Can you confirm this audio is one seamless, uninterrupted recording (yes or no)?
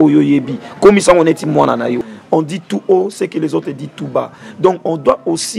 no